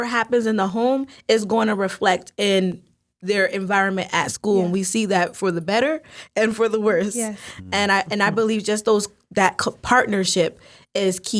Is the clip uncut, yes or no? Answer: yes